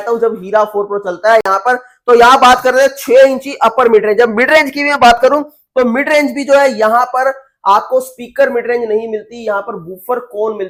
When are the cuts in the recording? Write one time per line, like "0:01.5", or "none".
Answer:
none